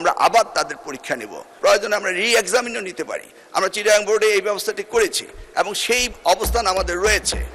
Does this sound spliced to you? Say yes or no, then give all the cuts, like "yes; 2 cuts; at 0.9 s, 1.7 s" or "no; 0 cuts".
yes; 1 cut; at 1.4 s